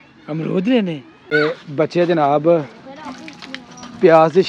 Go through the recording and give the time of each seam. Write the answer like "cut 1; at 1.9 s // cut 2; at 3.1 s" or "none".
cut 1; at 1.3 s